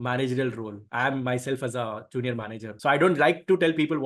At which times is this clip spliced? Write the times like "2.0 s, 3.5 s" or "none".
2.7 s